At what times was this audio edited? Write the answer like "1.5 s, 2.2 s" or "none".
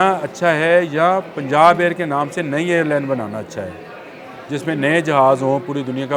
none